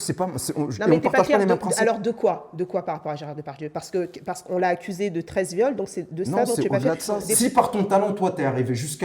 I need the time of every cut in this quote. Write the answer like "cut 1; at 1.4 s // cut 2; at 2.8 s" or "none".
cut 1; at 7.3 s